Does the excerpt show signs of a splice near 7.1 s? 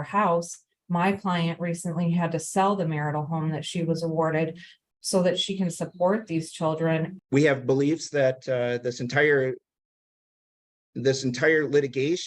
yes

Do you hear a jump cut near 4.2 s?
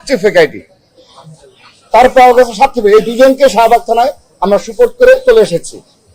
no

